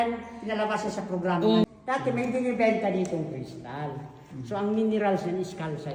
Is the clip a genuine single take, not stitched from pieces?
no; 1 cut; at 1.6 s

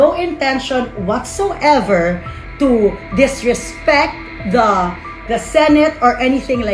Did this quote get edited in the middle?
no; 0 cuts

